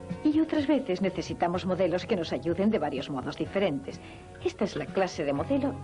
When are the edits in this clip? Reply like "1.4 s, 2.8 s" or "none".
4.7 s